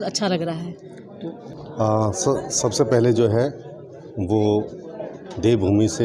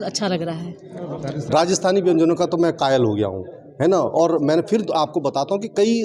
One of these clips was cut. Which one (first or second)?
second